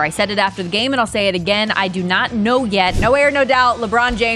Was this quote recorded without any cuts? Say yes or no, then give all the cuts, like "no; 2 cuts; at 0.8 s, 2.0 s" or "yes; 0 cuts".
no; 1 cut; at 3.0 s